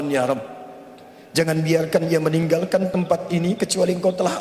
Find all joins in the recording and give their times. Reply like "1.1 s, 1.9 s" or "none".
none